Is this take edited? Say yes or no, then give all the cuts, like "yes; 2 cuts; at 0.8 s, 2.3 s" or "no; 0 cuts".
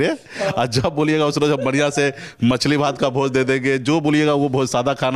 no; 0 cuts